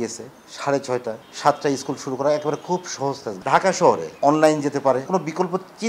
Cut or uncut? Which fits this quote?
cut